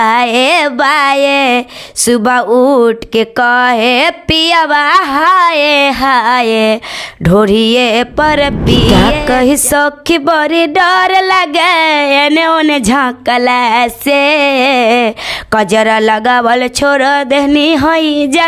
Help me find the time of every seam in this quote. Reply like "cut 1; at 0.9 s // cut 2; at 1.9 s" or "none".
cut 1; at 8.9 s